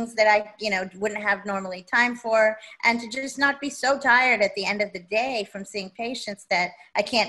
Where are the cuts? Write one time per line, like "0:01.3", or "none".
none